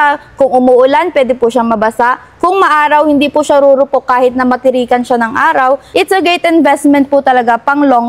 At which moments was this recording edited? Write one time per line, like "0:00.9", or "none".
0:05.9